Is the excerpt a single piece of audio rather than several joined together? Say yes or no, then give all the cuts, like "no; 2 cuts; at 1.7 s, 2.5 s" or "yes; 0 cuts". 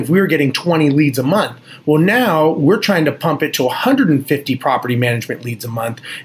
yes; 0 cuts